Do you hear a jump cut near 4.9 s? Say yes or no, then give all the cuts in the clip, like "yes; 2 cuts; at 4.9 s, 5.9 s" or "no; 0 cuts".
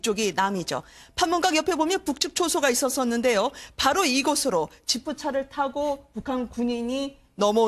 yes; 1 cut; at 4.9 s